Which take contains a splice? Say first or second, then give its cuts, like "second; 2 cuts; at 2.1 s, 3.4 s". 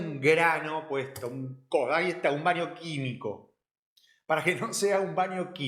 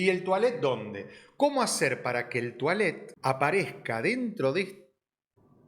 second; 1 cut; at 3.1 s